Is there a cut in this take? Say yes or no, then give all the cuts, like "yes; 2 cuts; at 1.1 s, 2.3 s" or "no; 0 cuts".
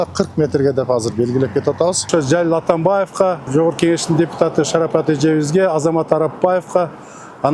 yes; 2 cuts; at 2.1 s, 3.5 s